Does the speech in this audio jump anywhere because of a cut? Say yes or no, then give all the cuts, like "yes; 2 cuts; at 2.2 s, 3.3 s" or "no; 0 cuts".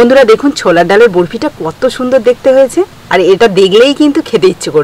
no; 0 cuts